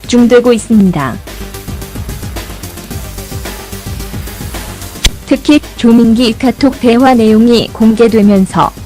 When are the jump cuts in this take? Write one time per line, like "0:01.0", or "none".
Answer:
none